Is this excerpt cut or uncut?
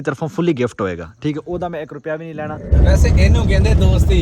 cut